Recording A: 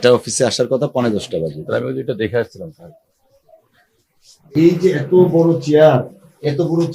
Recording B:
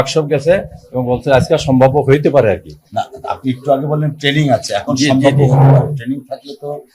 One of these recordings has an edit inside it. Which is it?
A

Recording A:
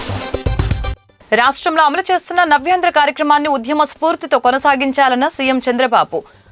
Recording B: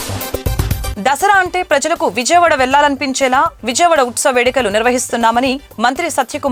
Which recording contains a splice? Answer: A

